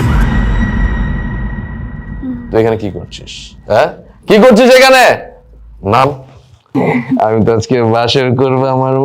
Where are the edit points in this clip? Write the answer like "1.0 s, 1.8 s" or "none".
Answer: 6.7 s